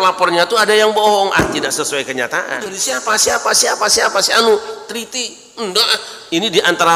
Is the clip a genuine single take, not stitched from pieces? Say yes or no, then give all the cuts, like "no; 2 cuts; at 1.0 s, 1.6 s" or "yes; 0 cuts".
no; 1 cut; at 2.9 s